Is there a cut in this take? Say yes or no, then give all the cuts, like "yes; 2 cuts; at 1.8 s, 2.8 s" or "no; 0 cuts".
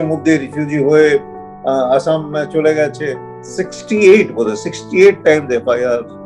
yes; 1 cut; at 3.3 s